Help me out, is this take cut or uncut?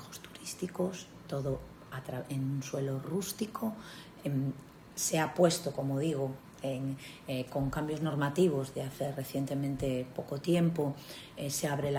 uncut